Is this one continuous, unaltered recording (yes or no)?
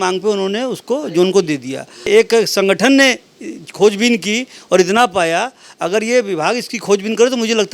no